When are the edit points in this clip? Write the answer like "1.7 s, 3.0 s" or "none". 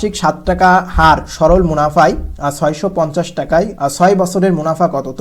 3.7 s